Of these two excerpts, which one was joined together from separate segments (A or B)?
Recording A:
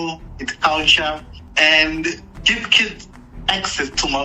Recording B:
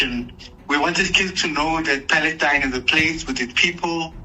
A